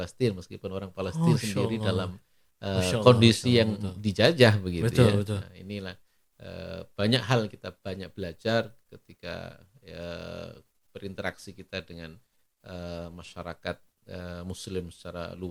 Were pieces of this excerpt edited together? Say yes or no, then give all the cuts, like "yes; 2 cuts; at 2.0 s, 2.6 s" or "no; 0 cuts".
no; 0 cuts